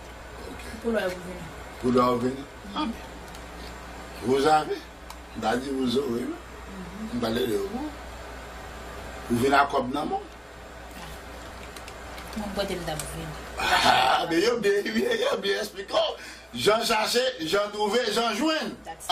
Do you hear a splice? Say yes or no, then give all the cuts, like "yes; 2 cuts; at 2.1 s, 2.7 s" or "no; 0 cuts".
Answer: yes; 1 cut; at 8.1 s